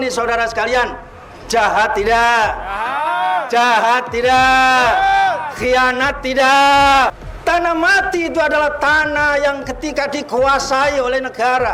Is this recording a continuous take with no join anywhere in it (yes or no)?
no